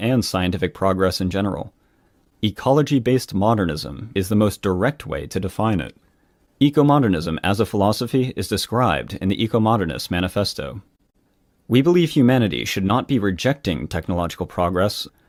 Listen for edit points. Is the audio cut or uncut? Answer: uncut